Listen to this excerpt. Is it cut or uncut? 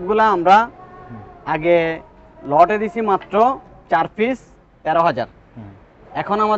uncut